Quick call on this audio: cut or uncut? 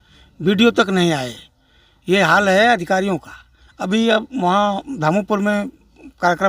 uncut